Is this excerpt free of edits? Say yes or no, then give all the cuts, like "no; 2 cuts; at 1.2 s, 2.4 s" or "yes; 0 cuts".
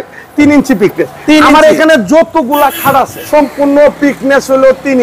no; 1 cut; at 3.2 s